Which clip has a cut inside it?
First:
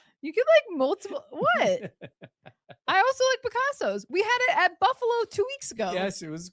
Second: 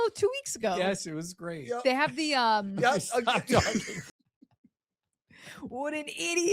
second; 1 cut; at 4.0 s

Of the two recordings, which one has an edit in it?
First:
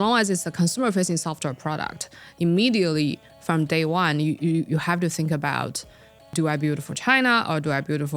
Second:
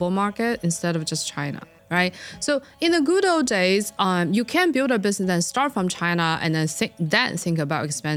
first; 1 cut; at 6.3 s

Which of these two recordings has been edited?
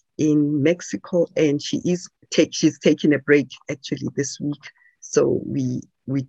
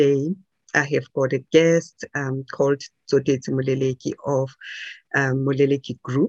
first; 1 cut; at 2.1 s

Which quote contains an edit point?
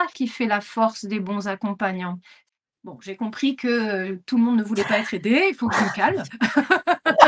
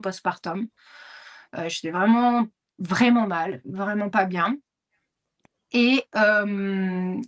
first; 1 cut; at 2.4 s

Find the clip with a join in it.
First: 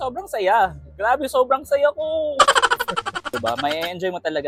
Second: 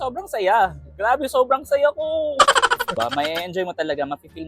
second; 1 cut; at 2.9 s

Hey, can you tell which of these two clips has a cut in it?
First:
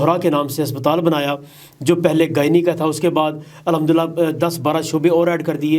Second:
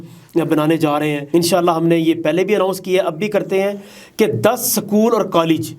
second; 1 cut; at 1.2 s

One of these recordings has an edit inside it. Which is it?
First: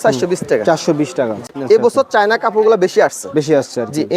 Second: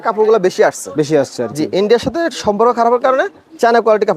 first; 1 cut; at 1.5 s

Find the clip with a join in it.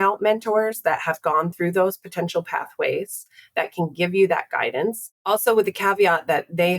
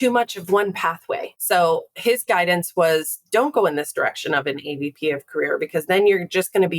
second; 1 cut; at 1.3 s

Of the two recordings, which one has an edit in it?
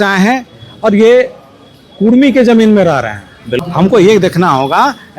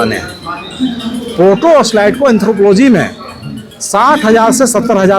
first; 1 cut; at 3.5 s

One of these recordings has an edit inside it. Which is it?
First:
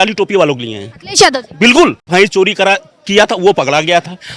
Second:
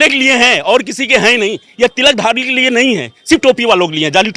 first; 1 cut; at 2.0 s

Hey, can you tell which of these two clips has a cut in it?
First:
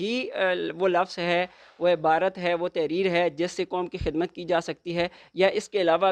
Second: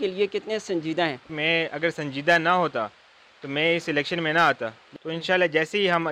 second; 2 cuts; at 1.3 s, 4.9 s

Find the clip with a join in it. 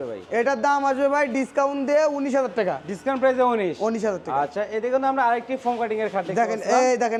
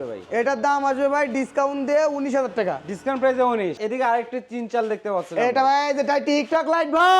second; 1 cut; at 3.8 s

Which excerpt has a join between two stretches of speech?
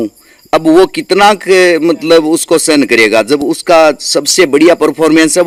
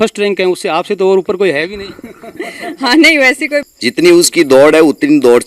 second; 1 cut; at 3.7 s

